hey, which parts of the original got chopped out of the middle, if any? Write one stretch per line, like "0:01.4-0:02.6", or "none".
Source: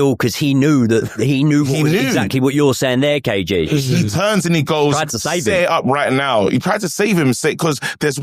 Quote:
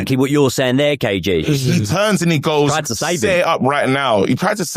none